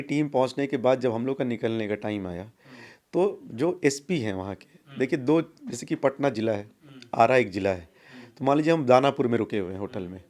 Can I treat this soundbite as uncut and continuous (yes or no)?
yes